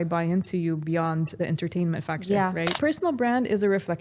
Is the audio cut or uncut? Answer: cut